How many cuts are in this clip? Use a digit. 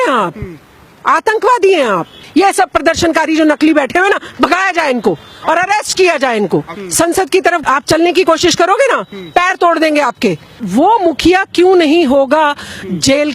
3